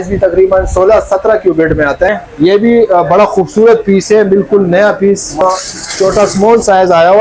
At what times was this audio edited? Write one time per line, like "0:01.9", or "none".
0:02.1
0:05.4